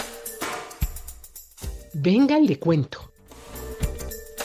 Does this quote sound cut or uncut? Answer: cut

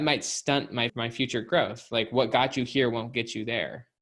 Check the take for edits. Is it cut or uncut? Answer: cut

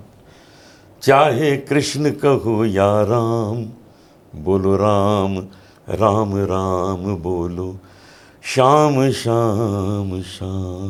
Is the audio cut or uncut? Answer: uncut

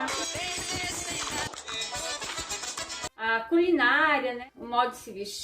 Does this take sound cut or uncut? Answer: cut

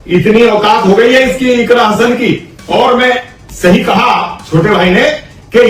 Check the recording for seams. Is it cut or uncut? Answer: uncut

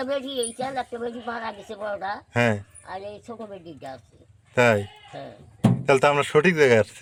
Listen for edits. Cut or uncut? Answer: uncut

